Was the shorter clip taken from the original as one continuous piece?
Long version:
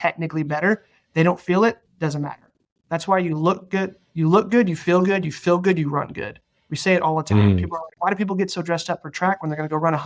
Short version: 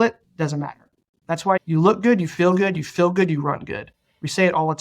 no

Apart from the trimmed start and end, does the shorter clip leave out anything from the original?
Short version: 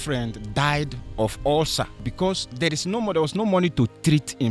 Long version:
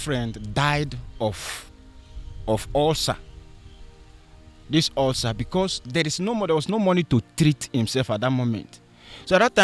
yes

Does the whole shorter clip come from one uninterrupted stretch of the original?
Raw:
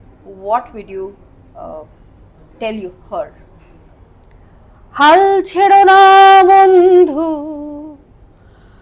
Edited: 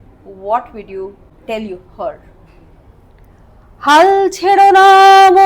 no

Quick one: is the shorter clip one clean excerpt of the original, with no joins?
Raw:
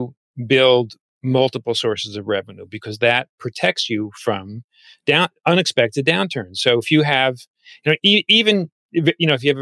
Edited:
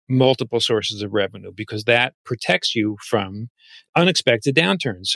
no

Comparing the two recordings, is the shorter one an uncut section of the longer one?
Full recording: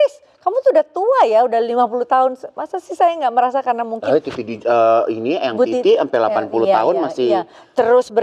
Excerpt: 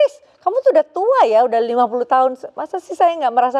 yes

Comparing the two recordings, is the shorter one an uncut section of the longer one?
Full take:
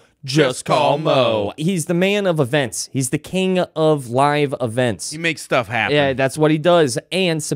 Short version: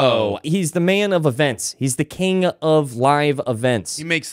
yes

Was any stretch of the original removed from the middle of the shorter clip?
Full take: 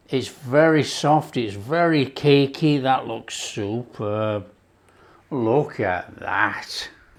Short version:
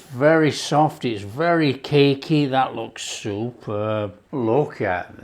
yes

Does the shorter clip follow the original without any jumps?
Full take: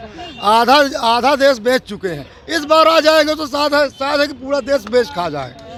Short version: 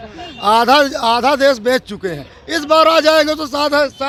yes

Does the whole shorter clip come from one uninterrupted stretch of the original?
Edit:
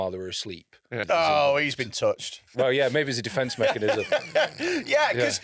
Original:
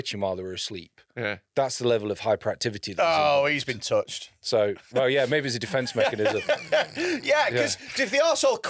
no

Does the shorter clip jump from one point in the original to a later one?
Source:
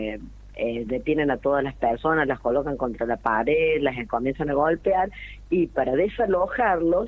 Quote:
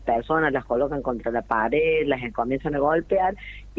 no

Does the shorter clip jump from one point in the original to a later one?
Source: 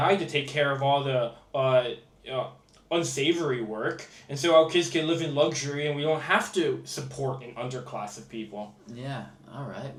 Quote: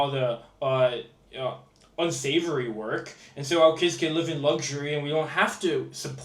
no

